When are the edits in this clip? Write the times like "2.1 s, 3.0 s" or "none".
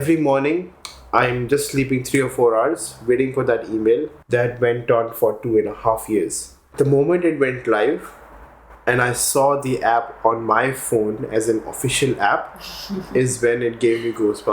4.1 s, 6.7 s

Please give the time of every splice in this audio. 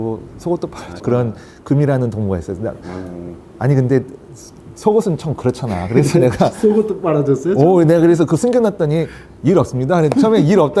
1.0 s

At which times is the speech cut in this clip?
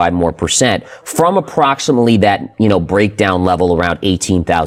none

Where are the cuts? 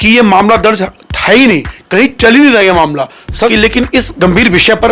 3.5 s

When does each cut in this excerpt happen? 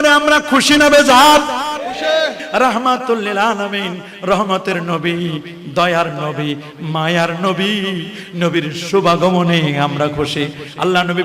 2.4 s

